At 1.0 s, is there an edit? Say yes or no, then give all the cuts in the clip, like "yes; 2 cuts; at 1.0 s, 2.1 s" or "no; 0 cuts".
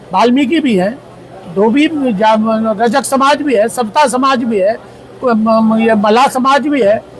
no; 0 cuts